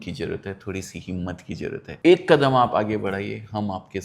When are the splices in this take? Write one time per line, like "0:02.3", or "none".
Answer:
0:01.9